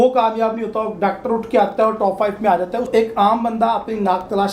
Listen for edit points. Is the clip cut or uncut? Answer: cut